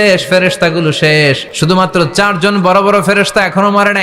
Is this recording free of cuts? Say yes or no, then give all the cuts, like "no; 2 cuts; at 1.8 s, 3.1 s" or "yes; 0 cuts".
no; 1 cut; at 1.5 s